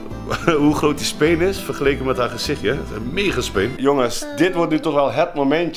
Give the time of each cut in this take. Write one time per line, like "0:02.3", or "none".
0:03.7